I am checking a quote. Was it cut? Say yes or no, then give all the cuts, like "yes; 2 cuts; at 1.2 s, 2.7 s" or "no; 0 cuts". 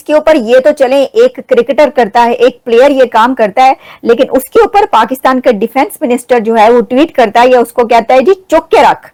no; 0 cuts